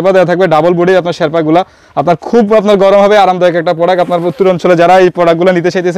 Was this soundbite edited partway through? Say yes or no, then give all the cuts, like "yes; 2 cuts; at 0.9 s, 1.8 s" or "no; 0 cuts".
no; 0 cuts